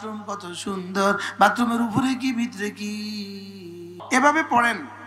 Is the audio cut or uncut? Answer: cut